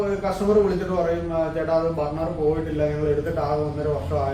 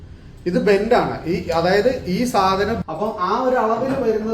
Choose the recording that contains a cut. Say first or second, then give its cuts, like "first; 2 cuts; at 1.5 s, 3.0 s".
second; 1 cut; at 2.8 s